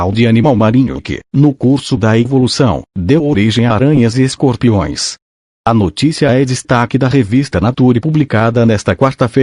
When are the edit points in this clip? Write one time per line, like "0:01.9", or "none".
none